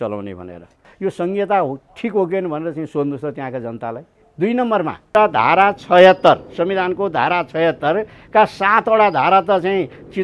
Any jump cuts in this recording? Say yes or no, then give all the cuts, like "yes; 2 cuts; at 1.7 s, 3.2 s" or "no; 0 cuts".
yes; 2 cuts; at 0.8 s, 5.1 s